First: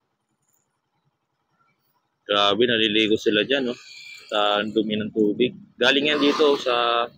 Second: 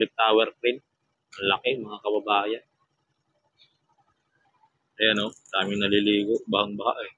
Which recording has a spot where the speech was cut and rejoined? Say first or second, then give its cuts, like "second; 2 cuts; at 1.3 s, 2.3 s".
second; 1 cut; at 4.4 s